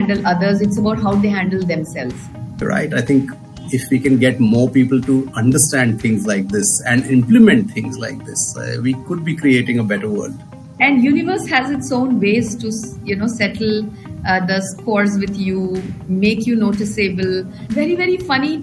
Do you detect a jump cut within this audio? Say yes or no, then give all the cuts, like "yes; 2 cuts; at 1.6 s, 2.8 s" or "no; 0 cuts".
yes; 3 cuts; at 2.5 s, 10.7 s, 17.6 s